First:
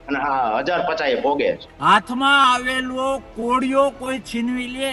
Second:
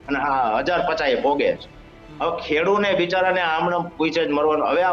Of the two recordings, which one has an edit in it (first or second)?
first